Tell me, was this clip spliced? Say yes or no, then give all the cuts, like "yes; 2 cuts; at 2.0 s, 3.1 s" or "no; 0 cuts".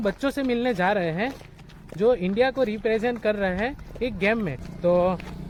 no; 0 cuts